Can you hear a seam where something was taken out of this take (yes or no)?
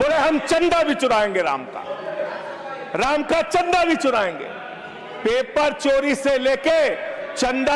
no